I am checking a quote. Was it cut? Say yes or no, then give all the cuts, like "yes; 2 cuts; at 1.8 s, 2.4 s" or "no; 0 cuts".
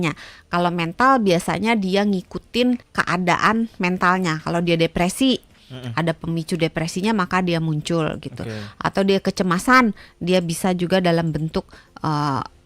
yes; 1 cut; at 2.9 s